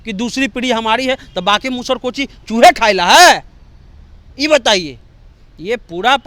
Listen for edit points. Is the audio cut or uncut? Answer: uncut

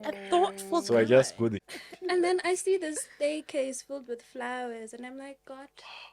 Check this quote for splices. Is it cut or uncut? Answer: cut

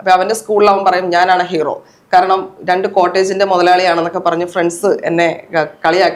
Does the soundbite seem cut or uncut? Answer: uncut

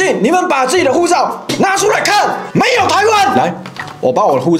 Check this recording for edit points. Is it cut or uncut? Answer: cut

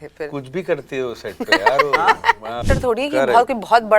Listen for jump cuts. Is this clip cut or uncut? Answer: cut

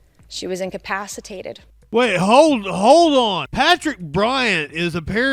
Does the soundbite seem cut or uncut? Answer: cut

